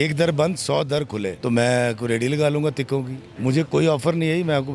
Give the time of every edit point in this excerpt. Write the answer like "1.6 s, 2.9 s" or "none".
1.3 s, 3.2 s